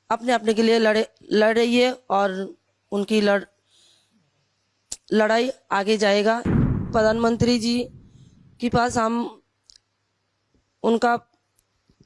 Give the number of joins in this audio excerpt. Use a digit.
1